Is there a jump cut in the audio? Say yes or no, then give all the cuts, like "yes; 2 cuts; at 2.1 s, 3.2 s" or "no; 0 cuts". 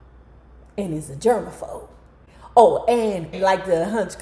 yes; 1 cut; at 3.3 s